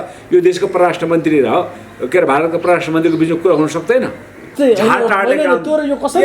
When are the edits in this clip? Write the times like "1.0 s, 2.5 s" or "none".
4.5 s